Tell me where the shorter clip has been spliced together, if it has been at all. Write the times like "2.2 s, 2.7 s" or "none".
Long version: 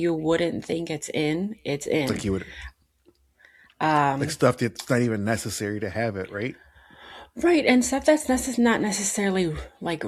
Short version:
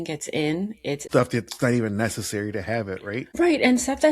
1.0 s, 3.3 s